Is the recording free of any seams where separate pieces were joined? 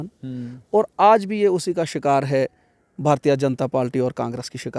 yes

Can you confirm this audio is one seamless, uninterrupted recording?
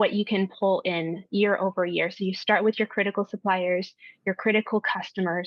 yes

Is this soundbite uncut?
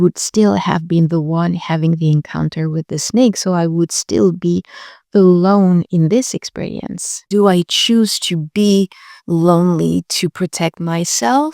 no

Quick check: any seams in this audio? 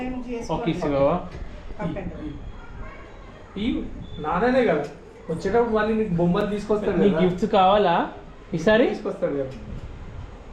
no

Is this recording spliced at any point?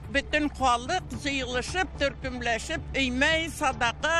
no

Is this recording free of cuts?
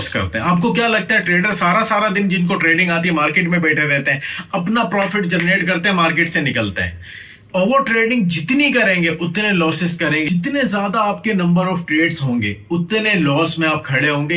yes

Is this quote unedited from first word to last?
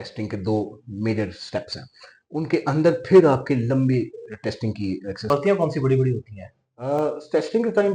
no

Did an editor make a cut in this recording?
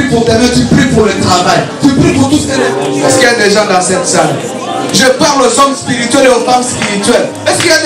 yes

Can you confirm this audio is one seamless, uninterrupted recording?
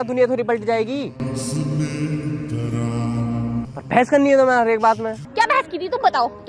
no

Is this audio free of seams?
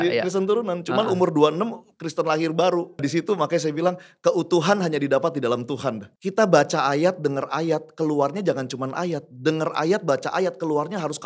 no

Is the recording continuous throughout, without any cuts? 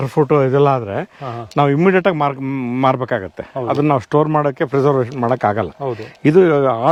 yes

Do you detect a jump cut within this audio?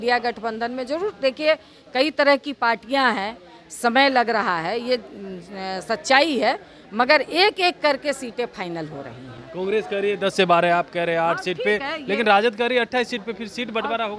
no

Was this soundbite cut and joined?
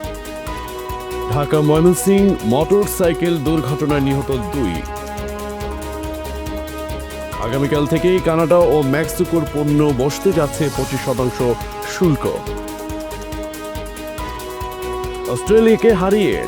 yes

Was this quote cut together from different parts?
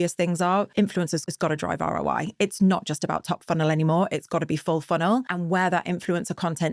yes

